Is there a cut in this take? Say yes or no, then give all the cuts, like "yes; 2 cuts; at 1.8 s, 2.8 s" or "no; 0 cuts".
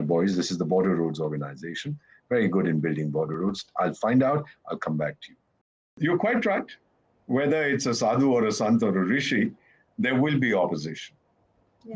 yes; 1 cut; at 5.9 s